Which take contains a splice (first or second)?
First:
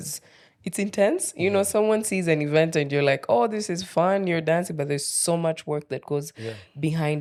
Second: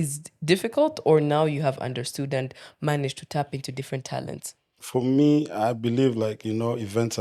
second